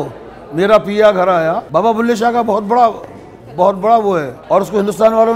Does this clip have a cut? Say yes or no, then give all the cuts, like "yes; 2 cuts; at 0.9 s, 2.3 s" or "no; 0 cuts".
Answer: yes; 2 cuts; at 1.6 s, 4.3 s